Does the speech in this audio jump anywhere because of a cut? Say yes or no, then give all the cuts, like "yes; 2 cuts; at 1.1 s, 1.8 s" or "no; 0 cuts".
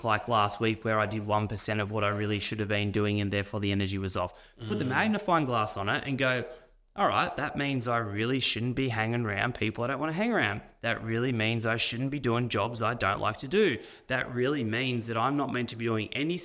no; 0 cuts